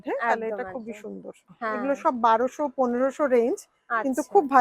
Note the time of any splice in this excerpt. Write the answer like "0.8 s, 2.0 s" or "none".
1.5 s